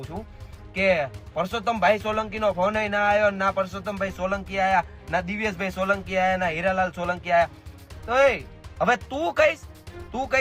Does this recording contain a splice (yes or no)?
no